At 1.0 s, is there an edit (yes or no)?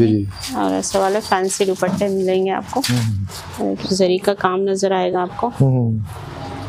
no